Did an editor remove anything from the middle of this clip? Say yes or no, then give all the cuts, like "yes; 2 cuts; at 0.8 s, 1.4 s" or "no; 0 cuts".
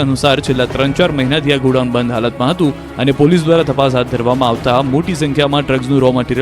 yes; 1 cut; at 5.1 s